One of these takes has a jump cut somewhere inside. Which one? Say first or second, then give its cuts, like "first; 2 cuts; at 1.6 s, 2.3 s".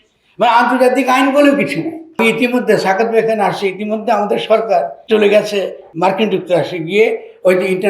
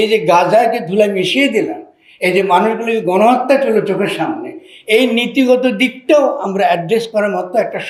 first; 3 cuts; at 2.2 s, 5.0 s, 5.9 s